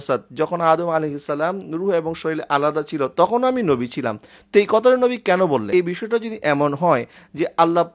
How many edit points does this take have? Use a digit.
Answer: 1